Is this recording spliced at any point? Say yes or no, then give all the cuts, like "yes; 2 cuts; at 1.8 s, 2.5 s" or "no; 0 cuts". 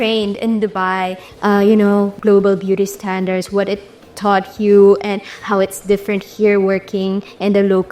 yes; 2 cuts; at 1.2 s, 2.2 s